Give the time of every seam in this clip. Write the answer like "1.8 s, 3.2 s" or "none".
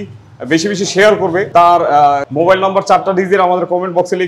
1.5 s, 2.3 s